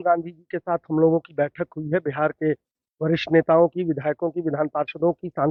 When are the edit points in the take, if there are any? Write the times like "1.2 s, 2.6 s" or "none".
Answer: none